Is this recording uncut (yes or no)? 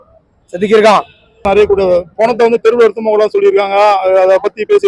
no